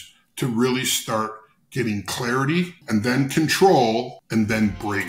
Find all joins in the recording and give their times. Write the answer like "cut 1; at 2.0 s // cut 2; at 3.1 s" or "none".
cut 1; at 2.8 s // cut 2; at 4.2 s